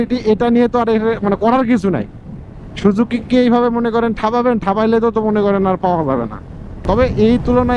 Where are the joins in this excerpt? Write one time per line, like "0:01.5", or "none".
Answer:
0:06.8